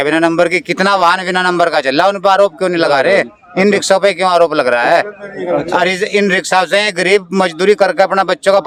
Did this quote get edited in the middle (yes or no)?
no